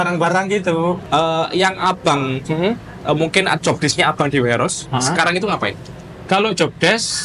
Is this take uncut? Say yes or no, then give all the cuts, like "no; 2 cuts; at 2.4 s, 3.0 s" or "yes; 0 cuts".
no; 1 cut; at 1.0 s